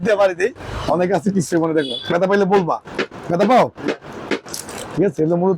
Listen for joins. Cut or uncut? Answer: uncut